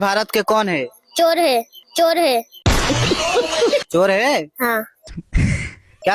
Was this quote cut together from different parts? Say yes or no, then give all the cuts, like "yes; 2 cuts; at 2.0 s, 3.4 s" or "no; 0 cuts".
no; 0 cuts